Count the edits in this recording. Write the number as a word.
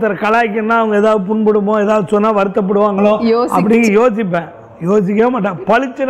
zero